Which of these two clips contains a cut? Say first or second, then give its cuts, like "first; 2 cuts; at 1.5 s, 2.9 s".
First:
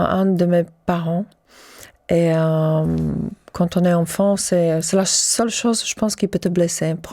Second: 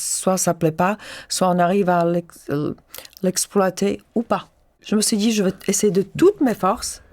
second; 1 cut; at 4.7 s